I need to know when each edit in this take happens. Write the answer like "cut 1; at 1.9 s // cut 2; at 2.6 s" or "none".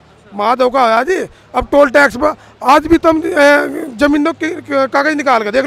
none